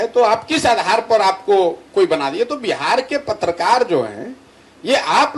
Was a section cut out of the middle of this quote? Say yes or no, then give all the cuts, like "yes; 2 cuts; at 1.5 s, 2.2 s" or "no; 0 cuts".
no; 0 cuts